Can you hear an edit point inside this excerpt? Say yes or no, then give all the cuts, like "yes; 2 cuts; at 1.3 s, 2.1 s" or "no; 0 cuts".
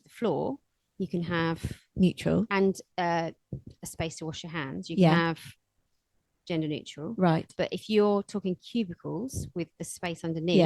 no; 0 cuts